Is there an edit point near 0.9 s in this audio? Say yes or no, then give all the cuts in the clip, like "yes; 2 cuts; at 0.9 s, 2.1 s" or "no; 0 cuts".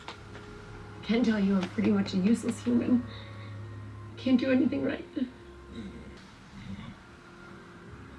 no; 1 cut; at 6.1 s